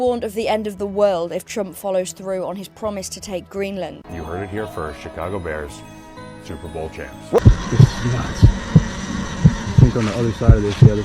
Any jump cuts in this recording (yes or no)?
yes